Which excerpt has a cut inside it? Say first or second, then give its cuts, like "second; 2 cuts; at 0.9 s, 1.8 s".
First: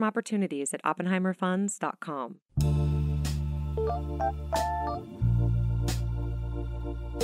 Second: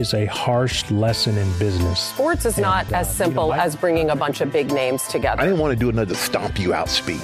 first; 1 cut; at 2.4 s